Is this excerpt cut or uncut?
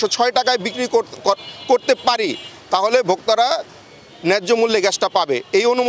uncut